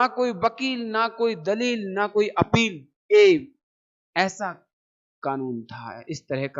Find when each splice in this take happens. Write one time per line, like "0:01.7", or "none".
none